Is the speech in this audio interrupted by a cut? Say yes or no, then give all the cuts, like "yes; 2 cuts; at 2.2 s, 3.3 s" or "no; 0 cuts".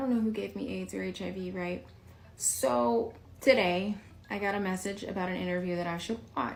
no; 0 cuts